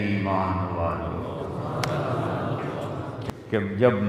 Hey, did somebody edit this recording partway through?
yes; 1 cut; at 3.1 s

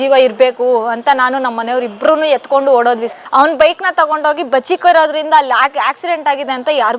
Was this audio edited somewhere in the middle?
yes; 1 cut; at 3.1 s

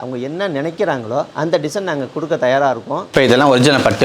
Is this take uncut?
no; 1 cut; at 3.0 s

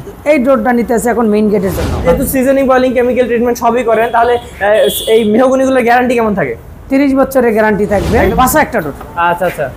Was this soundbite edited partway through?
yes; 2 cuts; at 2.0 s, 8.3 s

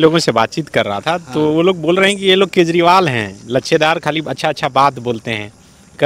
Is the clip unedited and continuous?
yes; 0 cuts

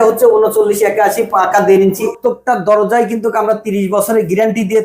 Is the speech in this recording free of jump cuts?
no; 1 cut; at 2.1 s

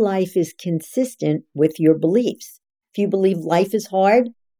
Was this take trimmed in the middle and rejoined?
yes; 1 cut; at 2.8 s

